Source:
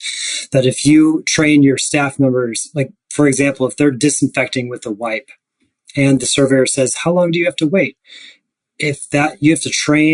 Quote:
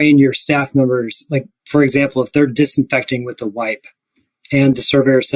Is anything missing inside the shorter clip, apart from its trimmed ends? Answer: no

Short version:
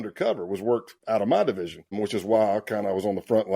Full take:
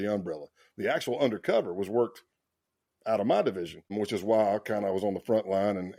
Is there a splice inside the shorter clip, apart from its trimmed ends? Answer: yes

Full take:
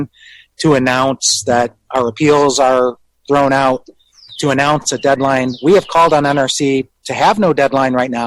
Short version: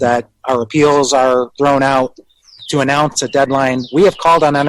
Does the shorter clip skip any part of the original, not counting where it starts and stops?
yes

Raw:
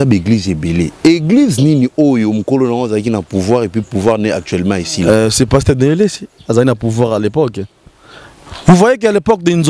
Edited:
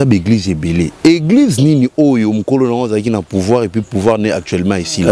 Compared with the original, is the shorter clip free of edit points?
yes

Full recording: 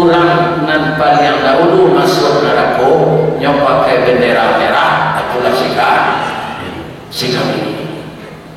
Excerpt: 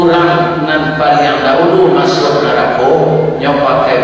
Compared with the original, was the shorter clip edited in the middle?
no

